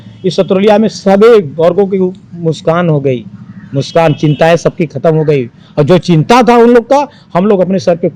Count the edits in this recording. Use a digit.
0